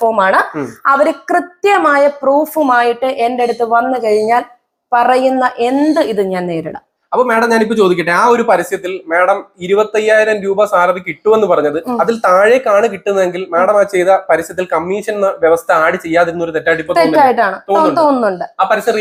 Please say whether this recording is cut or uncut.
uncut